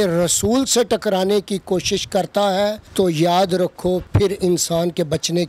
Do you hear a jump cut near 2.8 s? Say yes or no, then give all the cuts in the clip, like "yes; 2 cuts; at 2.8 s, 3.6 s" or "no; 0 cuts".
yes; 2 cuts; at 2.8 s, 4.1 s